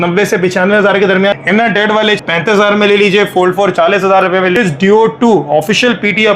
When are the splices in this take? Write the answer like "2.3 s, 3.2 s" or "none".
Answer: 1.3 s, 2.2 s, 4.6 s